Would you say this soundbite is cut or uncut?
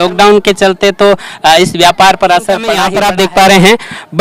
cut